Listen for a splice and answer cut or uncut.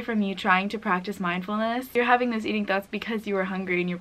cut